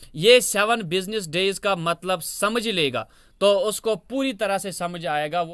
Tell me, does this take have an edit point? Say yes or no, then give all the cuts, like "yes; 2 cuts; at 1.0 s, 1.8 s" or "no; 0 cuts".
no; 0 cuts